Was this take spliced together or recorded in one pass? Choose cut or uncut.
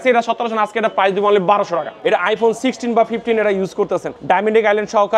cut